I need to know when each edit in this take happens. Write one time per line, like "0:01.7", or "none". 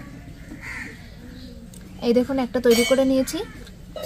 none